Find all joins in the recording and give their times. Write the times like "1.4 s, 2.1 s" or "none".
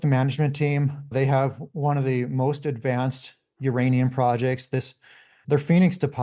1.1 s, 5.4 s